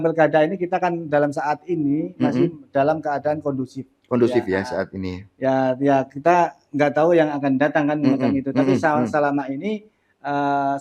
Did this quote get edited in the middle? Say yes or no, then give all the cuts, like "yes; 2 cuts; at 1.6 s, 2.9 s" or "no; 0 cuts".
no; 0 cuts